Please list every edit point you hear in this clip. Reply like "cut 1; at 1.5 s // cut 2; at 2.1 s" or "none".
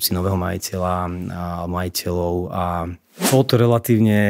cut 1; at 3.2 s